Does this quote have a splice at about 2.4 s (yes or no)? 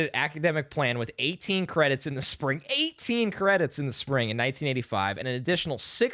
no